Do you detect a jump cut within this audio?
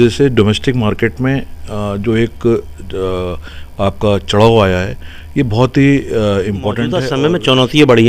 yes; 1 cut; at 7.0 s

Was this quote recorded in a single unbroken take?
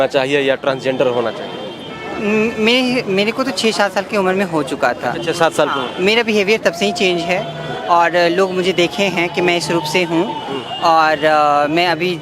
yes; 0 cuts

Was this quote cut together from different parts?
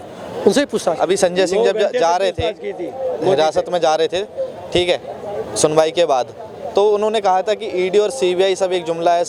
no; 0 cuts

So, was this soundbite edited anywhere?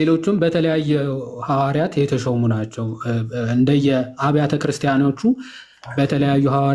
no; 0 cuts

